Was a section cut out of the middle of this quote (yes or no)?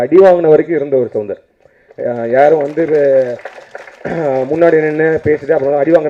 no